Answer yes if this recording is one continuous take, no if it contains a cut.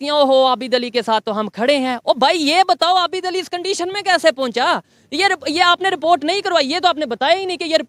yes